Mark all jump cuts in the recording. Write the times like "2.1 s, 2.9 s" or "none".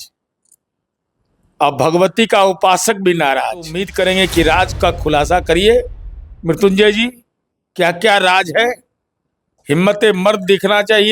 3.8 s